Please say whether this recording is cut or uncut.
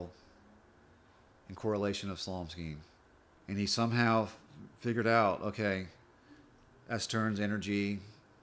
cut